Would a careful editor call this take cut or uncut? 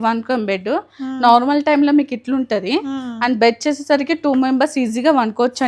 uncut